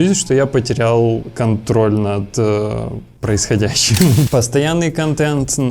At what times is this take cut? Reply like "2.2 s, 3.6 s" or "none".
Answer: 4.3 s

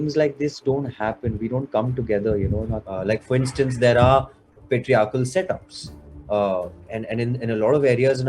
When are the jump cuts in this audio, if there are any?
2.8 s

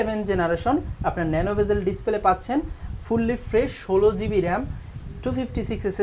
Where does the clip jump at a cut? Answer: none

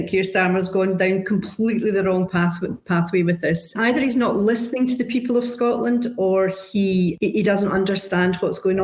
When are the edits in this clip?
3.8 s, 7.1 s

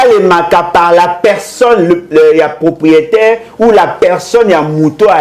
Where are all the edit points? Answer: none

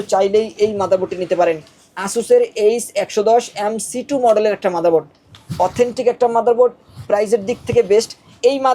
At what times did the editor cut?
none

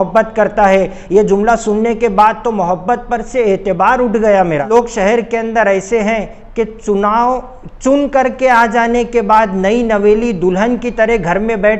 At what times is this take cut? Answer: 4.7 s

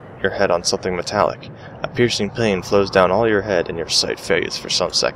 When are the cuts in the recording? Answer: 2.5 s

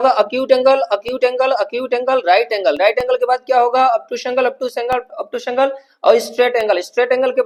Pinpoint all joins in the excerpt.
none

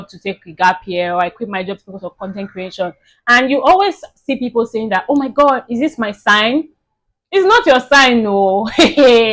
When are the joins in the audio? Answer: none

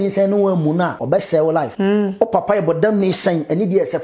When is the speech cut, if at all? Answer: 1.0 s, 1.7 s

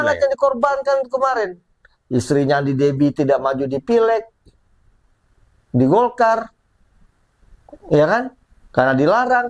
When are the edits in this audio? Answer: none

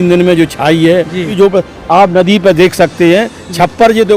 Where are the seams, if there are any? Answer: 1.3 s

